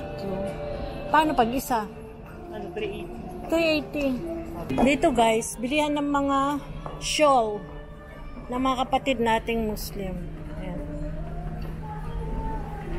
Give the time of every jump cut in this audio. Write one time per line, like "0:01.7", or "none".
0:04.7